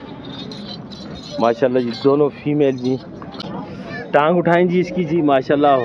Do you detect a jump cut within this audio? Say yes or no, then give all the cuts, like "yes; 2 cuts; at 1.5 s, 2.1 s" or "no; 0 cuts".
yes; 1 cut; at 3.4 s